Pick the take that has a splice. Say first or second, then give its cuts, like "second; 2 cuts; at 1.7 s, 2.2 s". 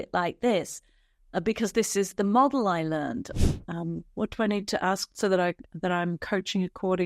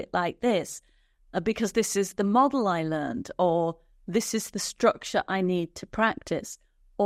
first; 1 cut; at 3.3 s